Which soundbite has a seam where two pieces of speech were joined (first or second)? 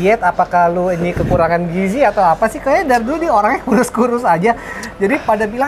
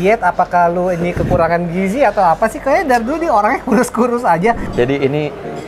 second